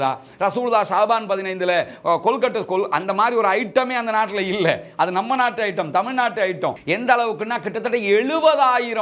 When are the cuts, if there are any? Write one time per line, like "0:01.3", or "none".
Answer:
0:06.8